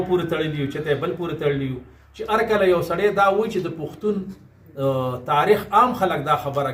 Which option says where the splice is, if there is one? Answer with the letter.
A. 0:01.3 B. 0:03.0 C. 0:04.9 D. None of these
D